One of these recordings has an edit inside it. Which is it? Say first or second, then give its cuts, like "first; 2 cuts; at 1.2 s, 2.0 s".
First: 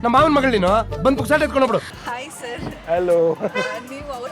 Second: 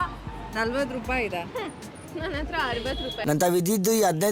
first; 1 cut; at 2.0 s